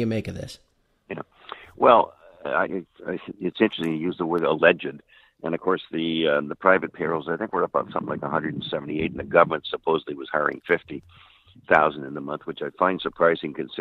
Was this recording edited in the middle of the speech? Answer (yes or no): yes